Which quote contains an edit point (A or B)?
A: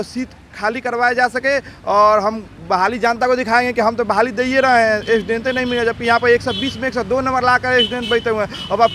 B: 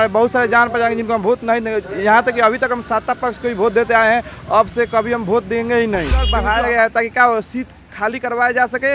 B